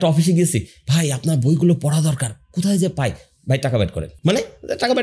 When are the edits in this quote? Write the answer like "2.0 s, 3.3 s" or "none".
4.1 s